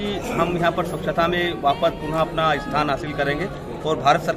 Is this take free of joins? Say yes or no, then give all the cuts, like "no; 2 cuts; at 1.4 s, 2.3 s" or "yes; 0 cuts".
yes; 0 cuts